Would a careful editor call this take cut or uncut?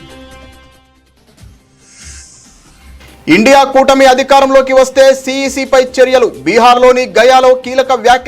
cut